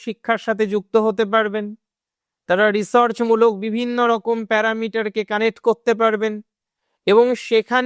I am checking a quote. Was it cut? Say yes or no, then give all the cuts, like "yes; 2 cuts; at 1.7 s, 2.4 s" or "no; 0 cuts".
no; 0 cuts